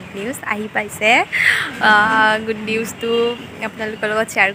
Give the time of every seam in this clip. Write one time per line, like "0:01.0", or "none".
none